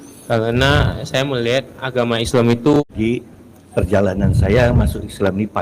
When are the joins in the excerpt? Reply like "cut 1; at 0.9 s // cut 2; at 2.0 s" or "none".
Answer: cut 1; at 2.8 s